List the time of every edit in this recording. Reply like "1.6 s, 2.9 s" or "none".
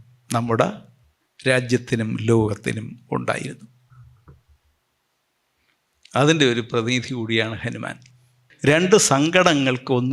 8.4 s